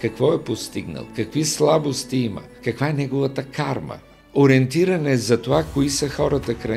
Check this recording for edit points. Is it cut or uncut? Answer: cut